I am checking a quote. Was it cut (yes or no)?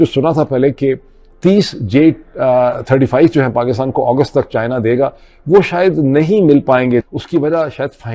yes